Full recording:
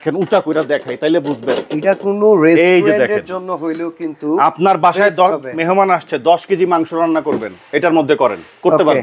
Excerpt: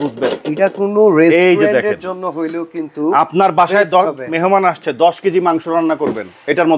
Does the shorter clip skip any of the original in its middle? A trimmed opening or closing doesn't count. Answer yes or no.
no